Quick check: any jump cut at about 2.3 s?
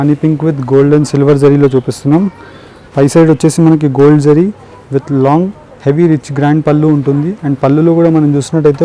no; 0 cuts

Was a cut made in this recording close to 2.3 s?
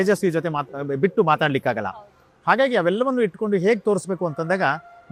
no; 0 cuts

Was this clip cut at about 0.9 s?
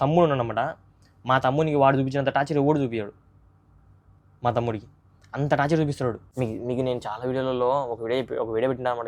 no; 1 cut; at 6.2 s

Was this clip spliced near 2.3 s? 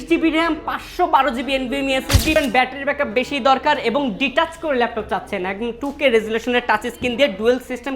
yes; 1 cut; at 2.3 s

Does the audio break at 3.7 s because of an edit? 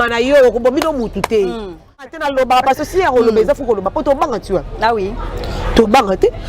no; 1 cut; at 2.2 s

